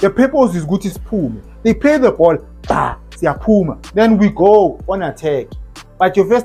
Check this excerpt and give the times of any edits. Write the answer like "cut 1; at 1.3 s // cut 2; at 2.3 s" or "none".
none